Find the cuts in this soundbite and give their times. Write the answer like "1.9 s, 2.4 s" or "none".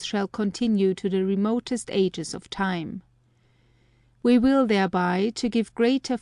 3.4 s

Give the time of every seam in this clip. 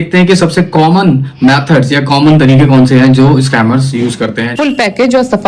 4.5 s

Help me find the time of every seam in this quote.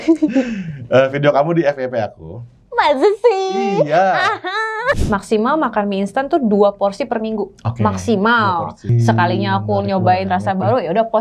5.0 s, 8.9 s

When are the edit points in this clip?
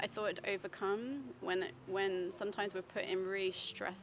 none

